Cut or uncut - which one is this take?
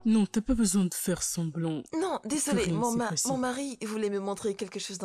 cut